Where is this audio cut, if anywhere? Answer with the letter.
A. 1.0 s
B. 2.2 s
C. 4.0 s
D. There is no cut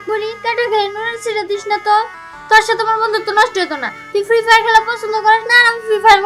D